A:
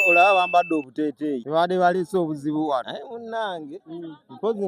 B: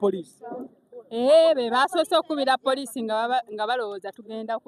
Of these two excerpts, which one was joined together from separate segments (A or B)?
A